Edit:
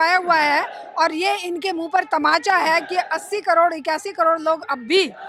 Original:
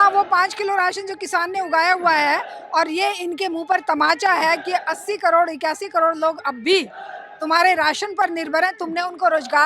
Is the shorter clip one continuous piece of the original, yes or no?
yes